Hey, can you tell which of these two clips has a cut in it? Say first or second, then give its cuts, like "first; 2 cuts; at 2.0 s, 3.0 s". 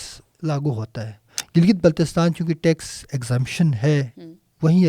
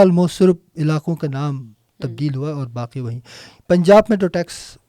first; 1 cut; at 1.3 s